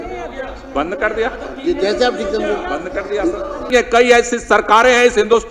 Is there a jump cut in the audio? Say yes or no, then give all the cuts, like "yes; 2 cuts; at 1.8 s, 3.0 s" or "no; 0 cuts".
yes; 1 cut; at 3.7 s